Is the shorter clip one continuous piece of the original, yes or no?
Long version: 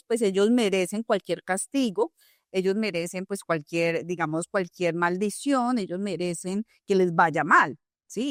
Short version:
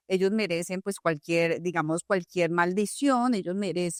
yes